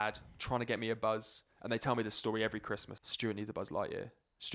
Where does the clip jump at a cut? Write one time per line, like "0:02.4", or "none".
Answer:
0:02.9